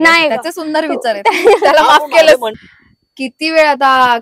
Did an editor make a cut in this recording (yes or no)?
yes